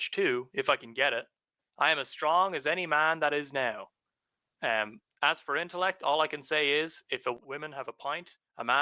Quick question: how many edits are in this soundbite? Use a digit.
1